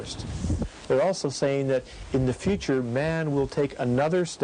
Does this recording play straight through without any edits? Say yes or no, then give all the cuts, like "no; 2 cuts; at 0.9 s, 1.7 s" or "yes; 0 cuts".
no; 1 cut; at 2.0 s